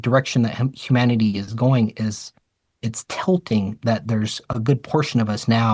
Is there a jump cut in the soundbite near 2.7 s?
no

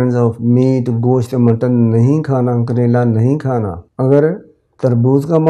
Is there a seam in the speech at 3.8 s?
yes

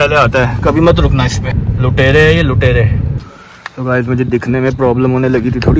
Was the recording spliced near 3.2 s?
yes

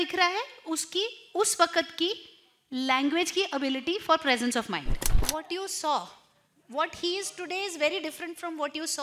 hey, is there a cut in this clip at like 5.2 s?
yes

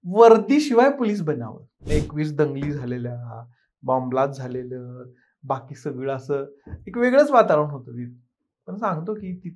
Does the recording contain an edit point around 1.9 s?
yes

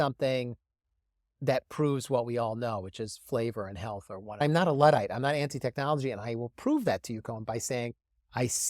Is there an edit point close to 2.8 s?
no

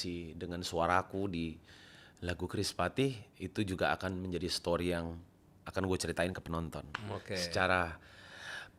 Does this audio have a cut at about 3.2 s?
no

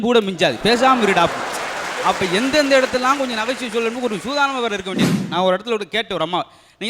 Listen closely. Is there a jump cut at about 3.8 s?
no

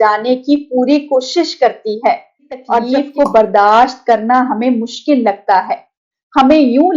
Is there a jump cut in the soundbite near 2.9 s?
yes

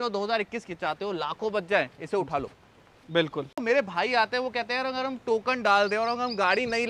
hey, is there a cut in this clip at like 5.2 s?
no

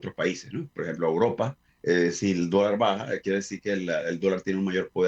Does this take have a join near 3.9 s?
no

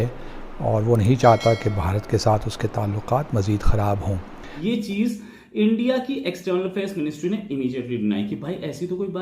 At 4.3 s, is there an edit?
yes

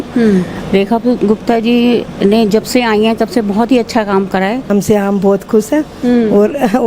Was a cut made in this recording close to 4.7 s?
yes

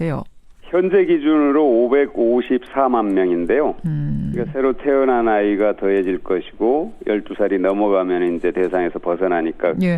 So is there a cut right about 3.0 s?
no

